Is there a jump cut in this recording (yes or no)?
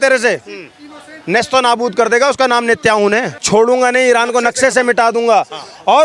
yes